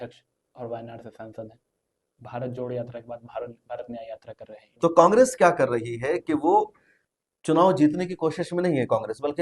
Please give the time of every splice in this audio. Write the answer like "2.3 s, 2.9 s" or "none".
4.7 s